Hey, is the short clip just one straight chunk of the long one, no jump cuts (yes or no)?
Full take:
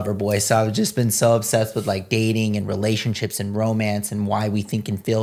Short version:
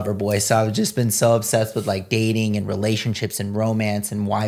yes